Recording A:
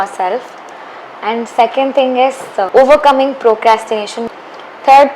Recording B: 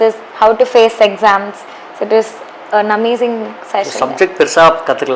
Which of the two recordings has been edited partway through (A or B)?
A